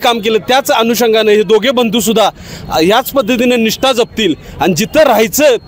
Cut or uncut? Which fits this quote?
uncut